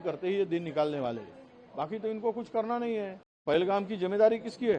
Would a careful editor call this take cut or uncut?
cut